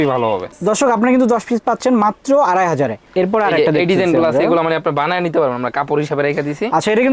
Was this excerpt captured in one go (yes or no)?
yes